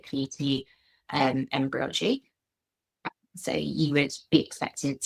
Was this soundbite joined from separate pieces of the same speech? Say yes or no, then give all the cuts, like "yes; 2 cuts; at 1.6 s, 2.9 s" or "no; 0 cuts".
no; 0 cuts